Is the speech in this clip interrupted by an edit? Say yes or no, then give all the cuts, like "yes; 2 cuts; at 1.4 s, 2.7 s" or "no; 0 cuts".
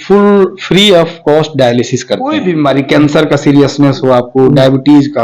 yes; 1 cut; at 2.3 s